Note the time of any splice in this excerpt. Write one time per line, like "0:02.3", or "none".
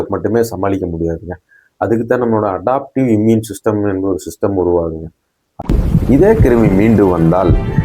0:05.7